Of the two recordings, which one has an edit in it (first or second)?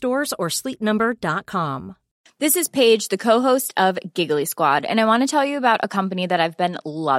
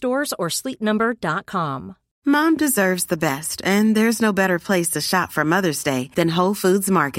first